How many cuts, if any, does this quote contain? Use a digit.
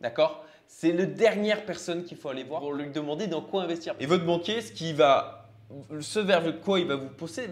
1